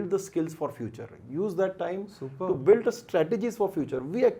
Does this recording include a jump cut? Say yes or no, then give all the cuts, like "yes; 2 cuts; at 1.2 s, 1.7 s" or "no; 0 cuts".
no; 0 cuts